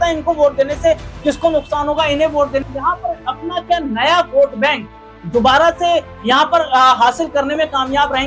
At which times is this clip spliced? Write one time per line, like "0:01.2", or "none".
0:02.7